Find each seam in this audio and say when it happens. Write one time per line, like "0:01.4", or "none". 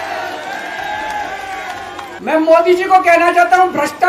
0:02.1